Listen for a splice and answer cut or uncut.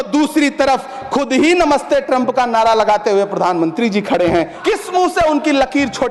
cut